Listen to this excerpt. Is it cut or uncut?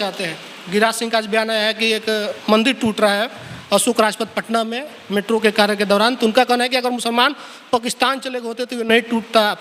uncut